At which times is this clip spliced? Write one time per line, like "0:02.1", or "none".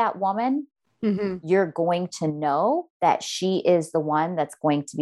0:02.9